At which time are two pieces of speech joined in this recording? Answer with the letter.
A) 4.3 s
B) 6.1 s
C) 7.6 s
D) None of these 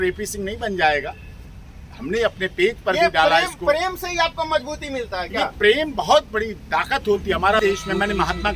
C